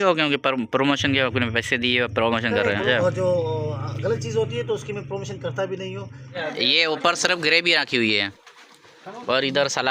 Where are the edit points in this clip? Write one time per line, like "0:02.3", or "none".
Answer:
0:02.8
0:06.5